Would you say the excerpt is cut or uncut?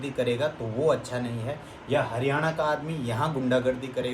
uncut